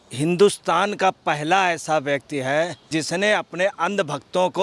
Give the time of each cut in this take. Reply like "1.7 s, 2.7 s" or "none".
2.9 s